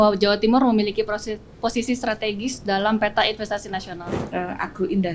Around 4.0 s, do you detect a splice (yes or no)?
yes